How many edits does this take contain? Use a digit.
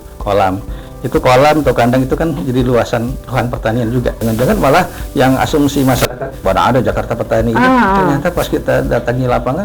1